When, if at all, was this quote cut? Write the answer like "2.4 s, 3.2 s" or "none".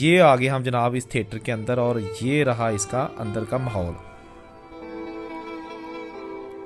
none